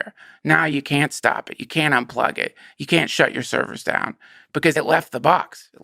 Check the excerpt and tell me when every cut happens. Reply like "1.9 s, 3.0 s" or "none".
4.7 s